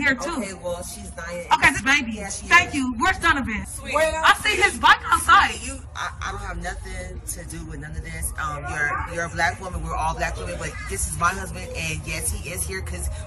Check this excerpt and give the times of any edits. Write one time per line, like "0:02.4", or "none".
0:02.3
0:03.6
0:05.9